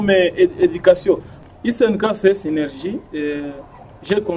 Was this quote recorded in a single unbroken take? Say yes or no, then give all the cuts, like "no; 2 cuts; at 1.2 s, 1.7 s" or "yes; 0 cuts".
no; 1 cut; at 1.4 s